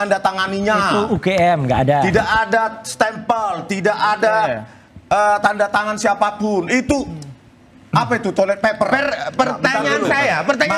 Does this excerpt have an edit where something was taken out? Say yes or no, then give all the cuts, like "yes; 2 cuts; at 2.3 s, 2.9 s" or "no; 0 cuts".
no; 0 cuts